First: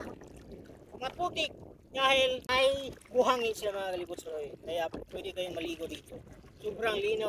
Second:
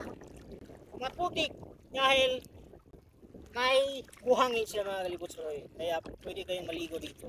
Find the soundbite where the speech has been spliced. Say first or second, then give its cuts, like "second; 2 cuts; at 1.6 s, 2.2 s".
first; 1 cut; at 2.4 s